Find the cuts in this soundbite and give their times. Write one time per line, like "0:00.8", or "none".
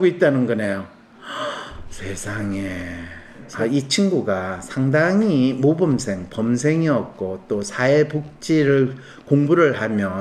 0:03.5

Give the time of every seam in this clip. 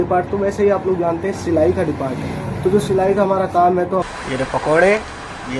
0:04.0

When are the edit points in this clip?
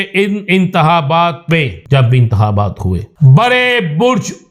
0:01.8
0:03.1

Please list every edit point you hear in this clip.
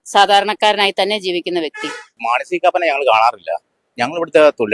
0:02.2

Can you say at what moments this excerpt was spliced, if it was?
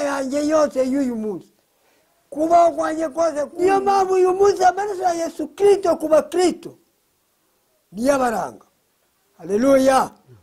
0:03.5

